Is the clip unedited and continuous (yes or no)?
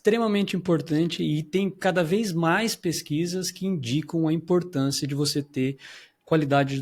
yes